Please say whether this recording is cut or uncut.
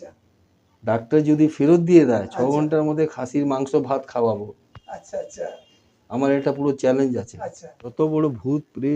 cut